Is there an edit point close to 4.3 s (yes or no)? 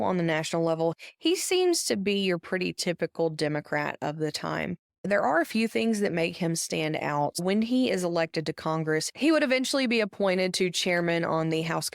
no